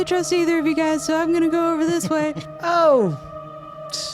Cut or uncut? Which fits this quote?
cut